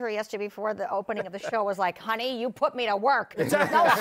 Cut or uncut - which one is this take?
uncut